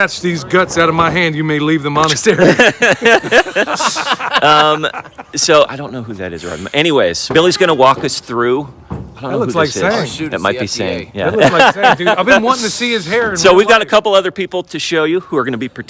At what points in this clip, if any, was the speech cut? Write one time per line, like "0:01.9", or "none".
none